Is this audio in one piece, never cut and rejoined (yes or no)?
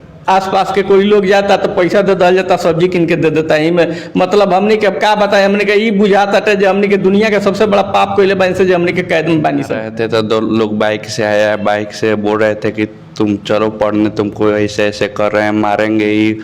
no